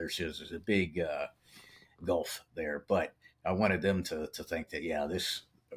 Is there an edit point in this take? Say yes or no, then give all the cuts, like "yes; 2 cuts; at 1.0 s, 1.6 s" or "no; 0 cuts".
no; 0 cuts